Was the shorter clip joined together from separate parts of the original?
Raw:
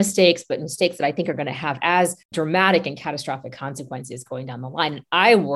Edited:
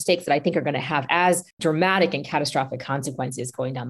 no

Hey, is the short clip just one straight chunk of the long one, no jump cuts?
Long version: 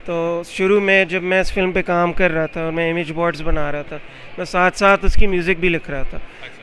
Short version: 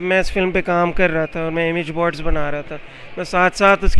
yes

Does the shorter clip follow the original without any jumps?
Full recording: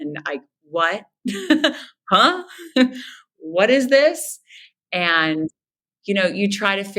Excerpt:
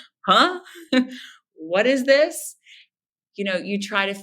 no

